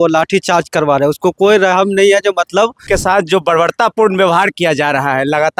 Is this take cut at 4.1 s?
no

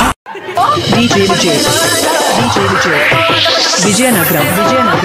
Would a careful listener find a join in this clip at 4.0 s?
no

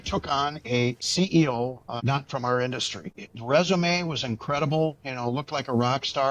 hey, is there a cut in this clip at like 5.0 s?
no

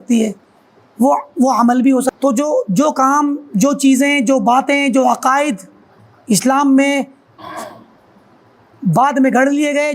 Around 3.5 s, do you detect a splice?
no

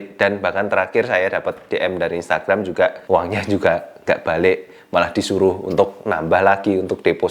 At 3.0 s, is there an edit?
yes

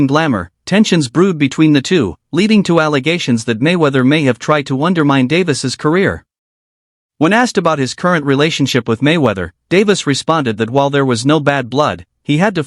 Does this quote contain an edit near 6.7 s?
no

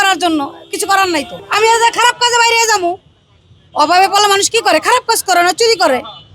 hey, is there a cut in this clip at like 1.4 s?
yes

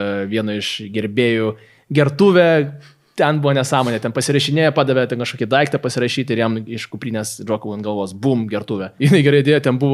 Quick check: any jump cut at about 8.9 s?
yes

